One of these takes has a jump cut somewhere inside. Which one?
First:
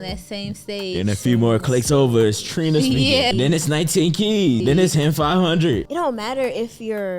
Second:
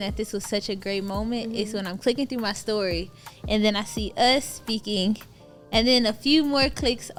first; 3 cuts; at 3.3 s, 4.6 s, 5.8 s

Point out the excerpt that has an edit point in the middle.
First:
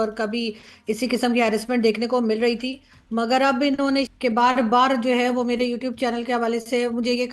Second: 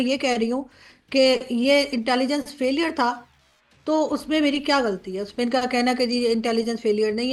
first; 1 cut; at 4.1 s

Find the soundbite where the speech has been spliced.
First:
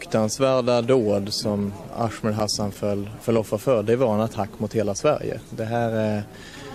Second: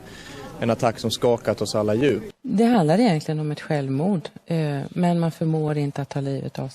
second; 1 cut; at 2.3 s

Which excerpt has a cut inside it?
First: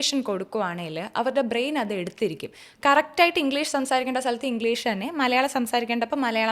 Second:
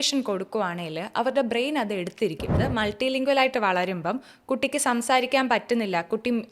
second; 1 cut; at 2.6 s

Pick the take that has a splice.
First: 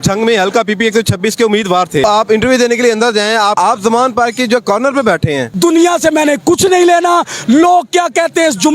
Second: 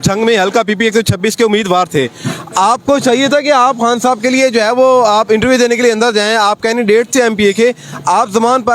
first; 3 cuts; at 2.0 s, 3.5 s, 5.5 s

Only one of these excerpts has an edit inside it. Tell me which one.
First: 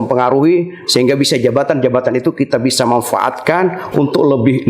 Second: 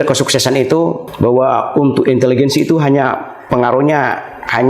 second; 1 cut; at 1.1 s

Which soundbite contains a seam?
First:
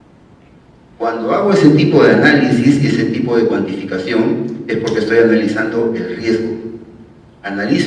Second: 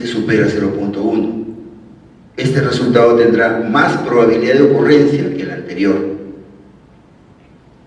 second; 1 cut; at 2.2 s

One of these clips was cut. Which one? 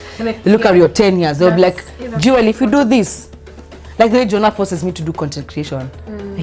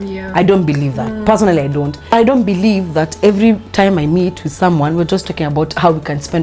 second; 1 cut; at 2.1 s

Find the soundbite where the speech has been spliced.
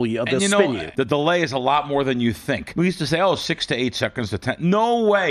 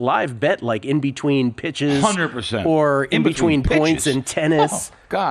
first; 2 cuts; at 0.8 s, 2.7 s

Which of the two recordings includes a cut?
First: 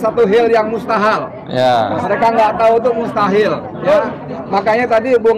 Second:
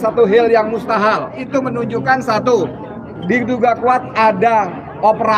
second; 1 cut; at 1.4 s

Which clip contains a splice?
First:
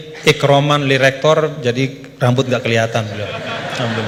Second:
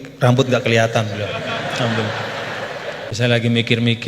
second; 1 cut; at 3.1 s

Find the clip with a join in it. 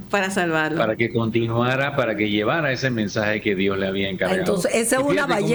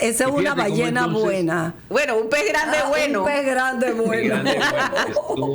second; 1 cut; at 1.8 s

